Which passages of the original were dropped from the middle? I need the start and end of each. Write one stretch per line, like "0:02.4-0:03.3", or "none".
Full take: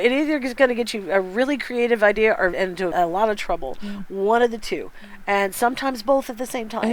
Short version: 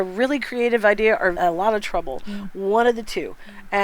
0:02.5-0:02.9